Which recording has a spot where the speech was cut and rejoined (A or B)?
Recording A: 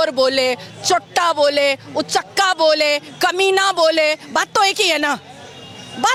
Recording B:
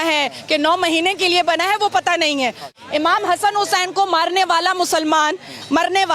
B